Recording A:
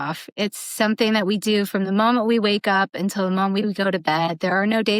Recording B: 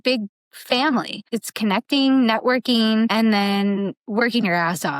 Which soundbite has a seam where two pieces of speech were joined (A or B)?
B